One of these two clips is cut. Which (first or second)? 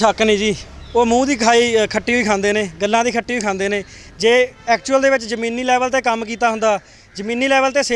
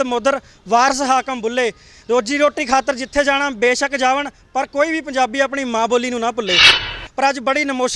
second